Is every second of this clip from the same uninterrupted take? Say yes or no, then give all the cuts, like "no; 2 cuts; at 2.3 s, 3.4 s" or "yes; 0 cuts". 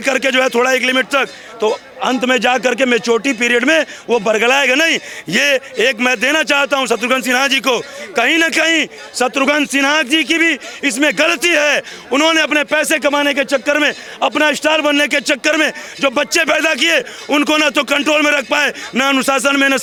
yes; 0 cuts